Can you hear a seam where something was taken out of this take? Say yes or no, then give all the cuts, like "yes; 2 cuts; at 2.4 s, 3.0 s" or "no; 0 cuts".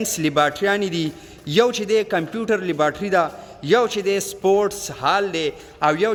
no; 0 cuts